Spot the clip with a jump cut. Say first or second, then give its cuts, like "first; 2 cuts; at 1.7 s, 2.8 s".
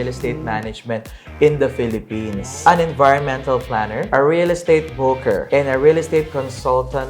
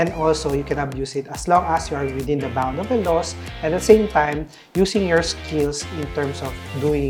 first; 3 cuts; at 2.4 s, 4.0 s, 5.4 s